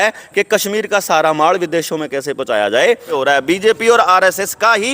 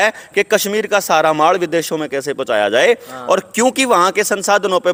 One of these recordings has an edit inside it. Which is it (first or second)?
first